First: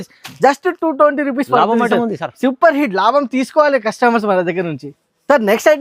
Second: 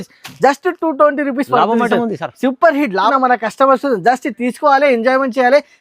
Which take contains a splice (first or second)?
second